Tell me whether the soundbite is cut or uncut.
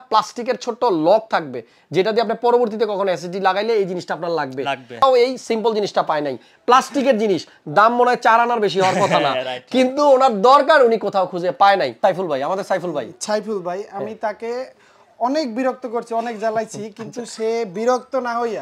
cut